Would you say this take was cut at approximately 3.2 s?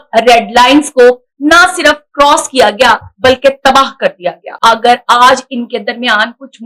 no; 1 cut; at 4.4 s

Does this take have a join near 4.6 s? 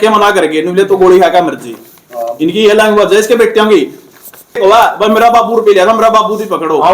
yes; 1 cut; at 4.6 s

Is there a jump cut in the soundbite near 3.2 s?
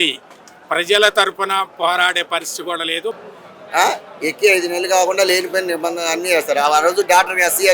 yes; 1 cut; at 3.2 s

